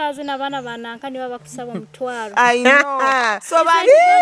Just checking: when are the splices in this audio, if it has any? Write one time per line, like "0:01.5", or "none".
none